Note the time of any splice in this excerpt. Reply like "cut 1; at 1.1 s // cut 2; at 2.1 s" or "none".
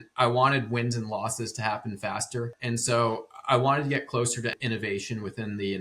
cut 1; at 2.6 s